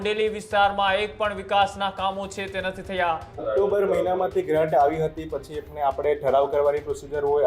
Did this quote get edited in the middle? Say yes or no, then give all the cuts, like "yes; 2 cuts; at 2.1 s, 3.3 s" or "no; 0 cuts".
yes; 1 cut; at 3.5 s